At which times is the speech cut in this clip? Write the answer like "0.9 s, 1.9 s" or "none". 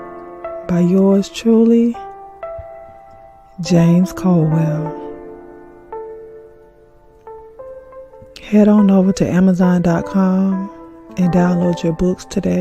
none